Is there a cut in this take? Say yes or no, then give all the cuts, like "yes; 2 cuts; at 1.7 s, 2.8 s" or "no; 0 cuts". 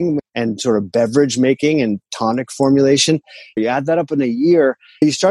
yes; 1 cut; at 3.6 s